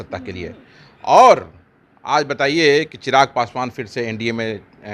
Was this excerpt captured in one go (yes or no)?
yes